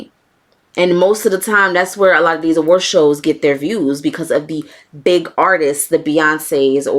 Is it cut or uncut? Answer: uncut